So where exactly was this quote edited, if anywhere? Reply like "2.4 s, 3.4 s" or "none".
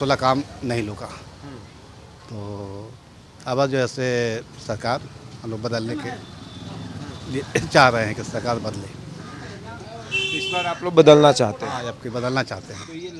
none